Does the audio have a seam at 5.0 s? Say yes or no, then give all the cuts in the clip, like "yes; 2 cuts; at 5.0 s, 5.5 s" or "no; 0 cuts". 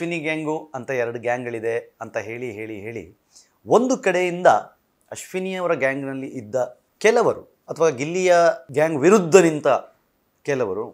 no; 2 cuts; at 6.8 s, 8.6 s